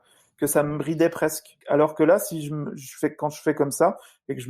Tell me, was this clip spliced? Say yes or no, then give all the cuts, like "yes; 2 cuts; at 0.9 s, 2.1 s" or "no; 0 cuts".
yes; 1 cut; at 1.6 s